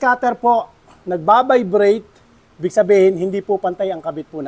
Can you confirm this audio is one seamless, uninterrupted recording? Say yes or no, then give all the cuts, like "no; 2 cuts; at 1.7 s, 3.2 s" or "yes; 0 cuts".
yes; 0 cuts